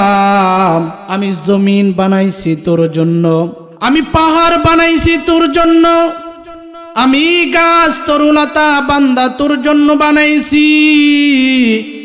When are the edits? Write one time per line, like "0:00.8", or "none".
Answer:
0:01.0
0:03.6